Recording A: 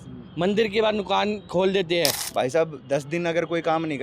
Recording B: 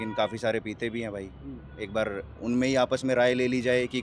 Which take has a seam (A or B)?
A